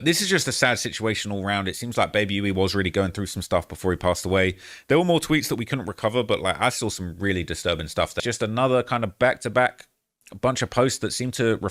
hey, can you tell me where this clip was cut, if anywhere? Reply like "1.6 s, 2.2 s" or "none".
8.2 s